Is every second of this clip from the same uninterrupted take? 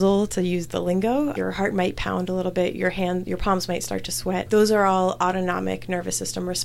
no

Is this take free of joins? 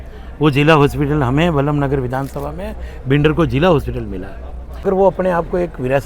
no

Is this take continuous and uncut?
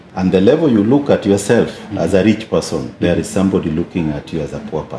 yes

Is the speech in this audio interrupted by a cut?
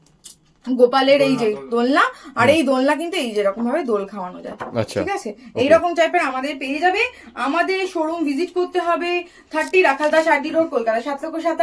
no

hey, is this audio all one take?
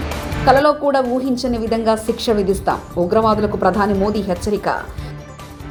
yes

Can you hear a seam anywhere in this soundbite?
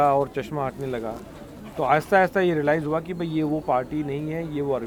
no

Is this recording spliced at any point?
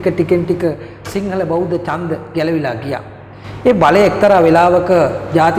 no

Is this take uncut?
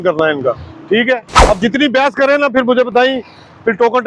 no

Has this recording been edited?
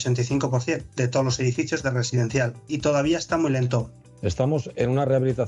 yes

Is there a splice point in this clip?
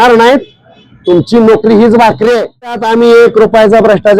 yes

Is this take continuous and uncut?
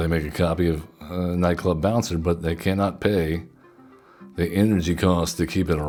yes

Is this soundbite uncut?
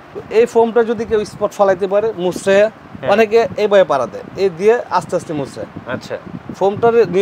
yes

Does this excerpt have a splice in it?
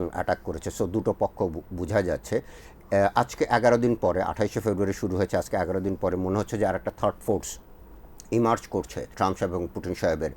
yes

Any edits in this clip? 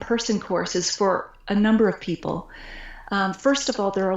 no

